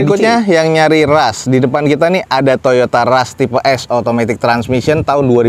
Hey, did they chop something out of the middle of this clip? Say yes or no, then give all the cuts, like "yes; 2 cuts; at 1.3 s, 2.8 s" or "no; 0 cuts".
no; 0 cuts